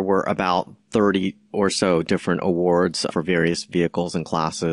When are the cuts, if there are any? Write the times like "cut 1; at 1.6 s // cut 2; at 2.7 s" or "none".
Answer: cut 1; at 3.1 s